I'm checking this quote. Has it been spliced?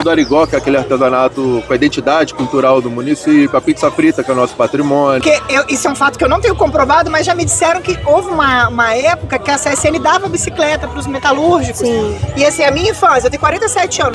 yes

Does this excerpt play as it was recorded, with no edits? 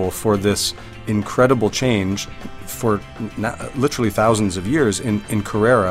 yes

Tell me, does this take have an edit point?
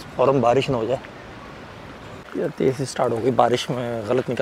no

